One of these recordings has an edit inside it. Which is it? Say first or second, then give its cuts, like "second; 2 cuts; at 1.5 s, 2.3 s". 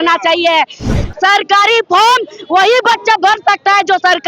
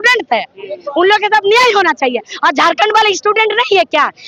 first; 1 cut; at 1.0 s